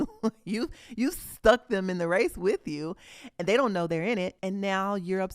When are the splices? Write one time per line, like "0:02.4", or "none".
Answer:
0:04.4